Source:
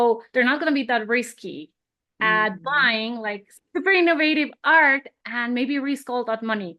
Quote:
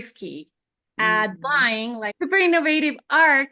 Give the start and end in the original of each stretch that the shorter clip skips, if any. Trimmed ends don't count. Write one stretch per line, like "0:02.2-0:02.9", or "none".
0:03.3-0:03.7